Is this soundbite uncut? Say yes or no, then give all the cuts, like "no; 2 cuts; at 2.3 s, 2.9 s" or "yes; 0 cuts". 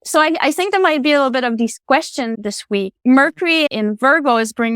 no; 2 cuts; at 2.4 s, 3.7 s